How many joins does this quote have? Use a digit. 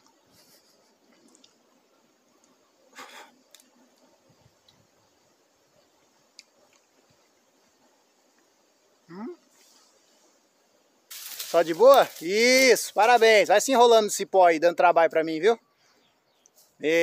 1